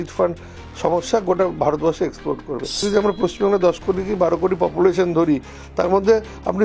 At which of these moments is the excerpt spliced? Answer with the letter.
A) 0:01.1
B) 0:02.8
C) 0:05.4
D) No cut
B